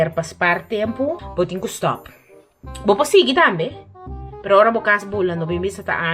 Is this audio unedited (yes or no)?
no